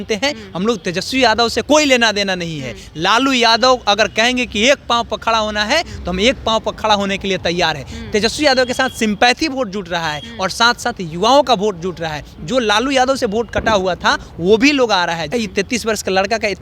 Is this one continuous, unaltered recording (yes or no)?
no